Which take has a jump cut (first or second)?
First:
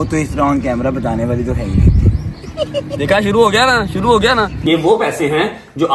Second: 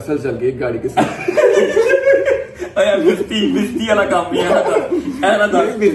first